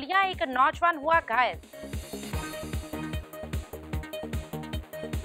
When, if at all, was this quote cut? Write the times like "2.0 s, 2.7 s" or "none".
1.7 s